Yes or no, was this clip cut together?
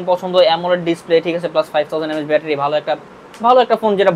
no